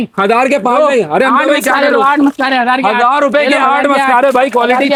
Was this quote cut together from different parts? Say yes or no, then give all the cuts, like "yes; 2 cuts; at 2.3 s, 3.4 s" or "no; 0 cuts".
no; 0 cuts